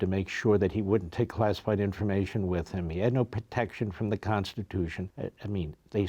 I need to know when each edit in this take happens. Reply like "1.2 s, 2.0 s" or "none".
5.1 s